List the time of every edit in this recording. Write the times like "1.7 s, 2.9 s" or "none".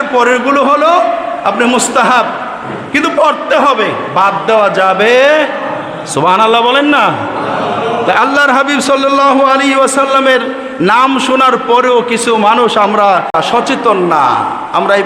13.3 s